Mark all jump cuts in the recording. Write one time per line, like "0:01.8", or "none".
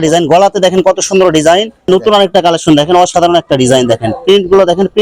0:01.7